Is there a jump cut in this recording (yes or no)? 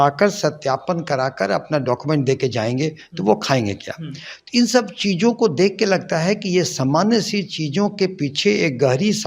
no